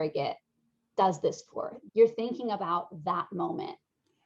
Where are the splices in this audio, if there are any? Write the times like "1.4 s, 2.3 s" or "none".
1.7 s